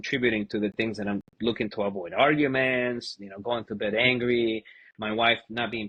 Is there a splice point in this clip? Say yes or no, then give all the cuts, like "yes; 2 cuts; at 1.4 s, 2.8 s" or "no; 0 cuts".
no; 0 cuts